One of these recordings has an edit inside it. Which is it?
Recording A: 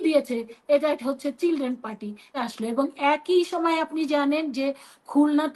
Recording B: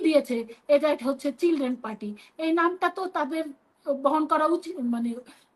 A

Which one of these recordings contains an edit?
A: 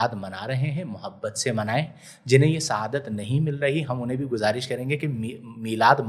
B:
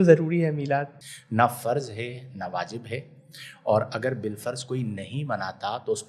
B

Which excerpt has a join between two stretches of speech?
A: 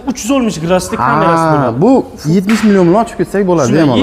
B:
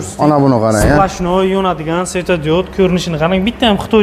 A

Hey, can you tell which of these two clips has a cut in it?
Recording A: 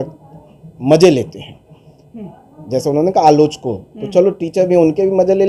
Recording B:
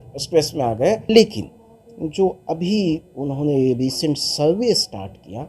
B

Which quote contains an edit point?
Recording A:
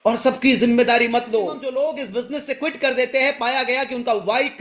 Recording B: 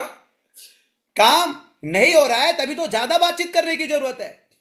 A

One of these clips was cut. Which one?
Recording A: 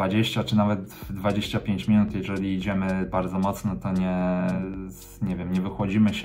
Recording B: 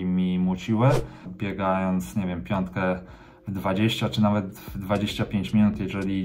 B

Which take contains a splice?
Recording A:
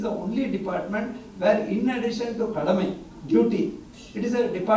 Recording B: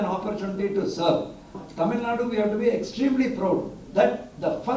B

